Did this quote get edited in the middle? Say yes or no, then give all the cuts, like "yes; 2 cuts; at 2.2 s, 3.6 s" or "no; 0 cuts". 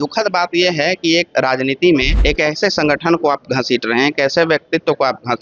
yes; 1 cut; at 2.1 s